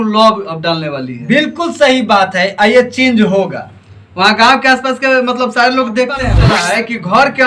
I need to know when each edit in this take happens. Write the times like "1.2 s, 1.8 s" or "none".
6.4 s